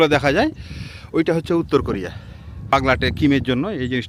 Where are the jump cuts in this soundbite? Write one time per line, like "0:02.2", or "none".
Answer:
0:02.7